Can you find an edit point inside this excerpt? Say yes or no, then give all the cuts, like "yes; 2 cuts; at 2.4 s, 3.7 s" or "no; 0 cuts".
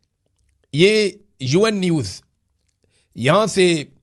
no; 0 cuts